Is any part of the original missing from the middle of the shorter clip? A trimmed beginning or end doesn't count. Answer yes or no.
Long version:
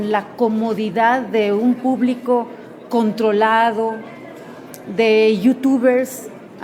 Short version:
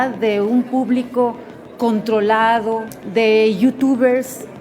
yes